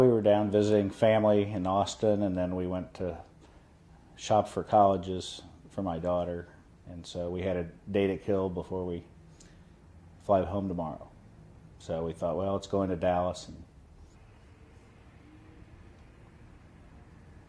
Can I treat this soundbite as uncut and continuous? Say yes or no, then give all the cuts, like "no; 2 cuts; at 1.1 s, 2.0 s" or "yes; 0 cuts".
yes; 0 cuts